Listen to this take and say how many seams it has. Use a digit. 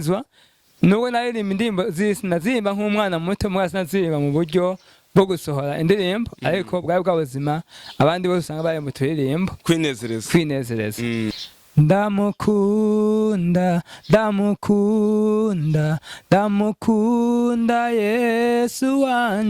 1